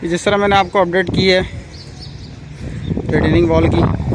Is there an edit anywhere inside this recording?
no; 0 cuts

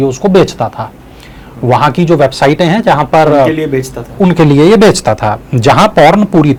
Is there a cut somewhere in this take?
no; 0 cuts

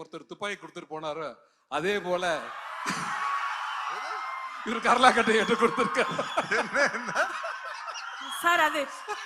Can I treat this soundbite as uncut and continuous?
yes; 0 cuts

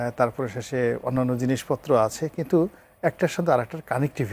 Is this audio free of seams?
yes; 0 cuts

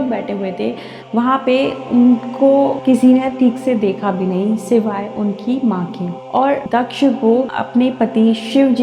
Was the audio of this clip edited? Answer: yes; 2 cuts; at 1.0 s, 6.7 s

